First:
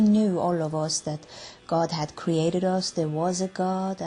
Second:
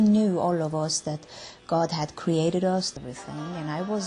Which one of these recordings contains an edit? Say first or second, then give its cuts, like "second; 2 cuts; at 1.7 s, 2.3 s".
first; 1 cut; at 2.9 s